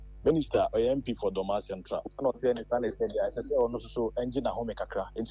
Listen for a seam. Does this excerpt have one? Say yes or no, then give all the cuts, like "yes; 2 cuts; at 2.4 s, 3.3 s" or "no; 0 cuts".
no; 0 cuts